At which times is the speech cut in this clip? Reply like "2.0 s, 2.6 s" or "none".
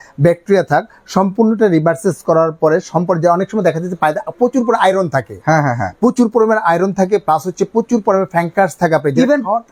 none